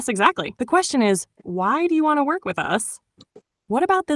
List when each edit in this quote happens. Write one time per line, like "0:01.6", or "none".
none